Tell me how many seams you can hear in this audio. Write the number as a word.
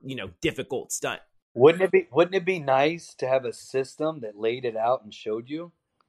one